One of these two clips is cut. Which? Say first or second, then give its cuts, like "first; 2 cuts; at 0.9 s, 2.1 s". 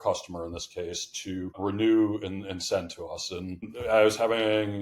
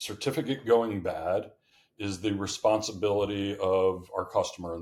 first; 2 cuts; at 1.6 s, 3.7 s